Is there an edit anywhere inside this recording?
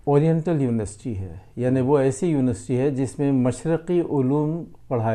no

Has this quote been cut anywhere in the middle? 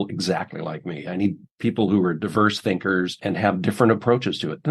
yes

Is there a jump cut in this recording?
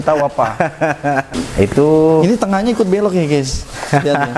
yes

